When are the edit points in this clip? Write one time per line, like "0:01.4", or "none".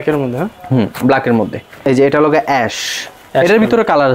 0:01.9